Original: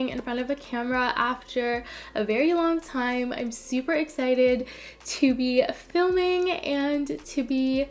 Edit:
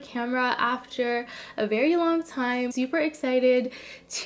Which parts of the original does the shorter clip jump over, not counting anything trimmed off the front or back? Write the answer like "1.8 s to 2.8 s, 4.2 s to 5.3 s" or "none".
3.3 s to 3.7 s